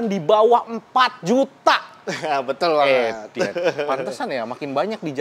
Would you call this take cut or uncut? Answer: uncut